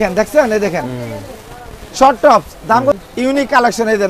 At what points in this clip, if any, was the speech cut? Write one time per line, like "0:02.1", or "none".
0:03.0